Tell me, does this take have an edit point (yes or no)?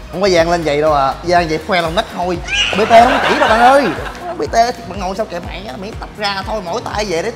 yes